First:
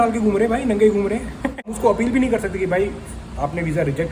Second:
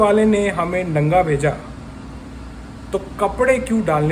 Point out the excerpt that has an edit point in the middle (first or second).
first